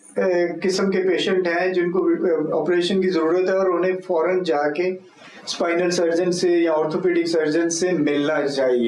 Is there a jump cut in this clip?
no; 0 cuts

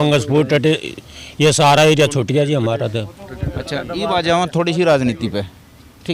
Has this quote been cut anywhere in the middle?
no; 0 cuts

